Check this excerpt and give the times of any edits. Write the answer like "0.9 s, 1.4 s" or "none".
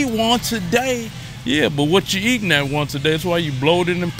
none